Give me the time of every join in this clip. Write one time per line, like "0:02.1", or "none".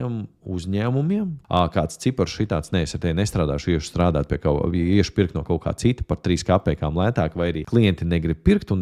0:01.4
0:07.6